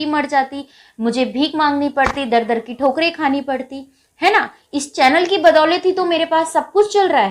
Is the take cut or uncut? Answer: uncut